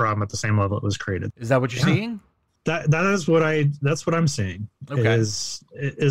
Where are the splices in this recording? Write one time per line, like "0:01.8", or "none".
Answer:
0:01.3

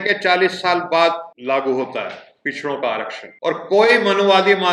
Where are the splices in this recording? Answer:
0:01.3
0:03.2

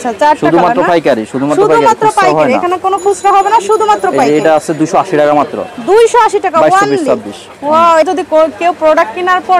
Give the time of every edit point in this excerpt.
0:08.1

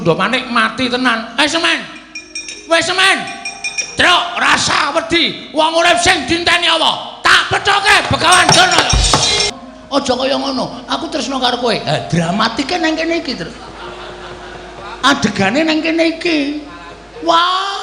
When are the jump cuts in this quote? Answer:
0:09.5

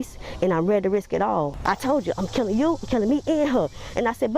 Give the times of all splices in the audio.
0:01.5

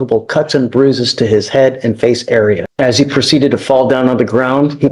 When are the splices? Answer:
0:02.7

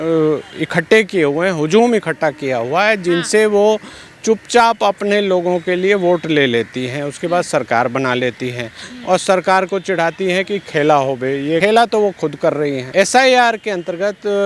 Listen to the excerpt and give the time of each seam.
0:11.6
0:12.8

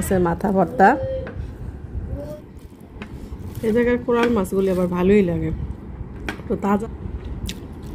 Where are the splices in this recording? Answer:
0:02.3
0:06.8

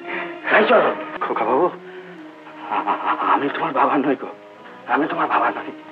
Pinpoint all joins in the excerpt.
0:01.1

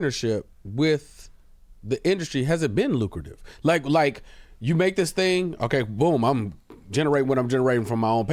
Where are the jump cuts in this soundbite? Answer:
none

